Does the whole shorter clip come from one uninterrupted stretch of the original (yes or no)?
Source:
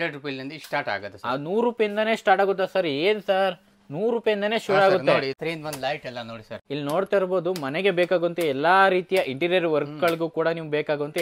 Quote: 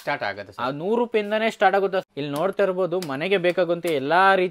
no